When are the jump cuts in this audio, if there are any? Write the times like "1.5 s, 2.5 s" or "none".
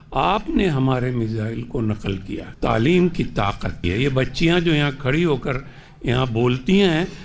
2.5 s, 3.9 s